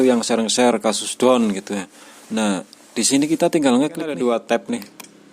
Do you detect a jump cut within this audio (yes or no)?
yes